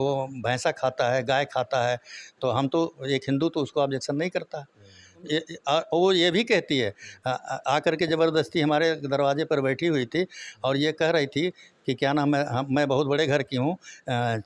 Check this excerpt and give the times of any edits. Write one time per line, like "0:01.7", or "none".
0:05.3